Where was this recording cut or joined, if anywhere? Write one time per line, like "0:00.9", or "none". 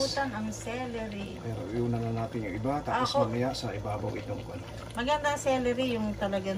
none